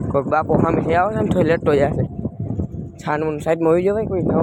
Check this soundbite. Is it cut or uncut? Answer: uncut